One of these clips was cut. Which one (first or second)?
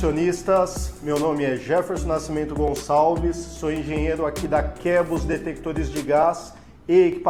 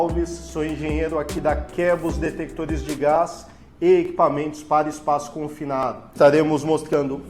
second